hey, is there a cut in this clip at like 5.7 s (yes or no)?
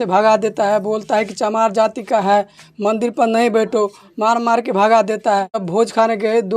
yes